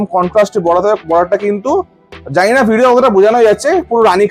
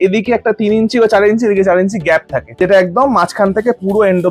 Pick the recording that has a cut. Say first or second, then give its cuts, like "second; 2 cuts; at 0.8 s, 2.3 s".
second; 1 cut; at 2.5 s